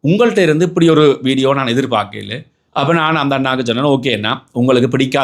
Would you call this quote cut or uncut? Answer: uncut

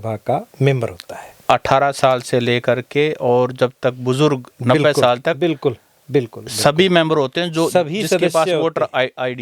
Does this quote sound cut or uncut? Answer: uncut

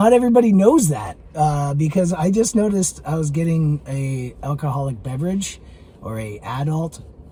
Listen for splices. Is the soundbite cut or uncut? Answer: uncut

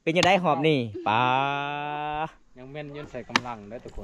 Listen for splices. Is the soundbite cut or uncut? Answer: cut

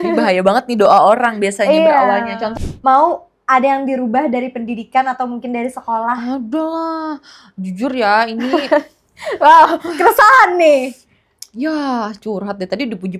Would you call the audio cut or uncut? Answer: cut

